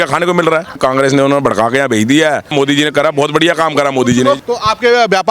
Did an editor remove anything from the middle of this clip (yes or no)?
yes